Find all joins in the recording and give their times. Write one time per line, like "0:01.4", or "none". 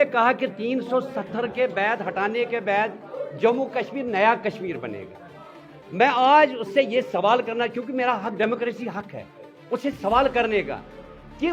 none